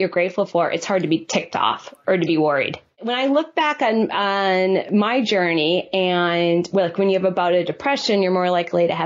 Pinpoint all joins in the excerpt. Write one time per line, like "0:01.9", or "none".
0:03.1